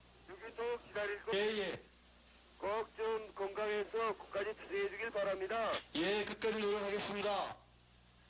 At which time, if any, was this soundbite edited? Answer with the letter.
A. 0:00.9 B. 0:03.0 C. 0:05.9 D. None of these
D